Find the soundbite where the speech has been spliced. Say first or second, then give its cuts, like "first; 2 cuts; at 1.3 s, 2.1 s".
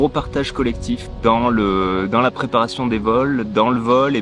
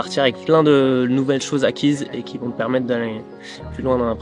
first; 1 cut; at 1.1 s